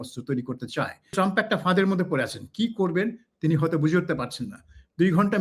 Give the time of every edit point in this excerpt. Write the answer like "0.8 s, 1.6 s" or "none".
1.1 s